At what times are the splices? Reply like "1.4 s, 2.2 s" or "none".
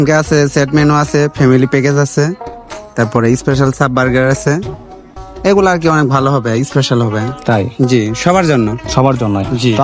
none